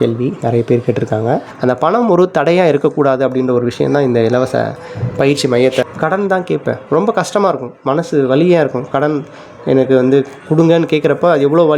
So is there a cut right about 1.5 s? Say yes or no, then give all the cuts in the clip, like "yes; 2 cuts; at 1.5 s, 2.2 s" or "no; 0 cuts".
yes; 2 cuts; at 1.5 s, 5.8 s